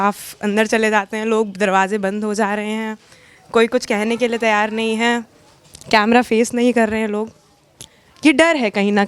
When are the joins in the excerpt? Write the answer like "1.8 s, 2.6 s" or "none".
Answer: none